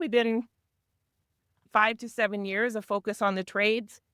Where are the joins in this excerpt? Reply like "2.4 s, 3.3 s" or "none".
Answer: 1.6 s